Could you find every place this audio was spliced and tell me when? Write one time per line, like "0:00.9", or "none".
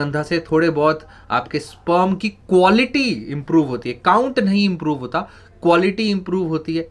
none